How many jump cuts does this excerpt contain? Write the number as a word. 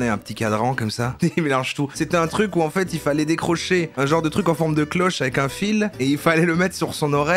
two